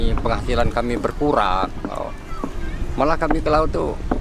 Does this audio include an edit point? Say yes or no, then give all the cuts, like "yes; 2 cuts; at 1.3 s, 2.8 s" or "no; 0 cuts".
no; 0 cuts